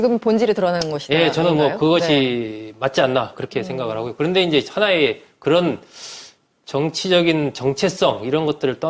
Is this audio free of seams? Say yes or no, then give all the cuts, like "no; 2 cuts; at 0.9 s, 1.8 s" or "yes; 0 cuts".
no; 1 cut; at 5.9 s